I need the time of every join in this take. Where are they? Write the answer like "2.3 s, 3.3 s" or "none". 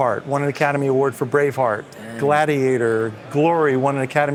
none